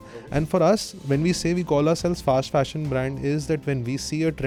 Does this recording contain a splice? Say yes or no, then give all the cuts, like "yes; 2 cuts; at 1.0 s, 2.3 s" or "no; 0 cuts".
no; 0 cuts